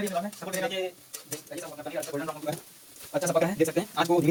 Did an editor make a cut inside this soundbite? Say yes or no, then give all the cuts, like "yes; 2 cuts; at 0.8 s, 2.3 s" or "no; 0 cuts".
no; 0 cuts